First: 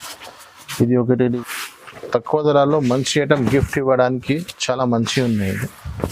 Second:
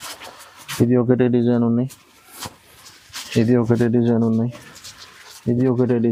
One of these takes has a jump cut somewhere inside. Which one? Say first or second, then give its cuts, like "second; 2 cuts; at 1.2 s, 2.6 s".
first; 1 cut; at 1.4 s